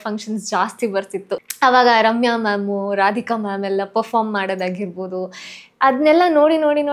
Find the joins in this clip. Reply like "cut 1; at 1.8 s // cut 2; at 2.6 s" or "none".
cut 1; at 1.5 s